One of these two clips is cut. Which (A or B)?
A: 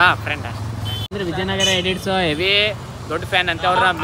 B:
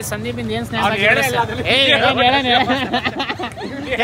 A